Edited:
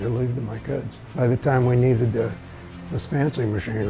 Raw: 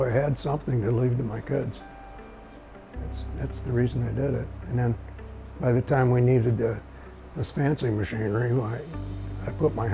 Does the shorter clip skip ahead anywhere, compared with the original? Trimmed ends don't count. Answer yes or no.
yes